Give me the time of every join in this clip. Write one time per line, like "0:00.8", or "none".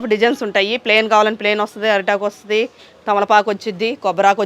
none